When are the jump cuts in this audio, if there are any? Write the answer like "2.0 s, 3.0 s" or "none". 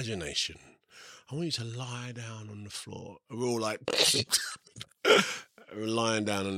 none

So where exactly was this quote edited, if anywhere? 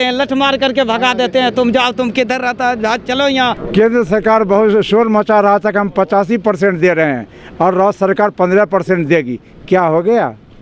3.6 s

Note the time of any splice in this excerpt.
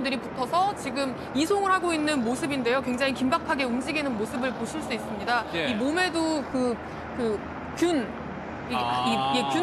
7.1 s

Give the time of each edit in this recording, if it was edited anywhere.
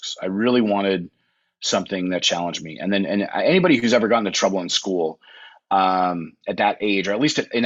none

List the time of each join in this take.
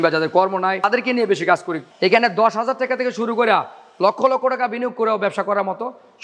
0.9 s, 1.8 s

